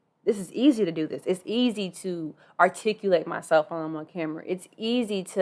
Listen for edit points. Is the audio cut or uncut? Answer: uncut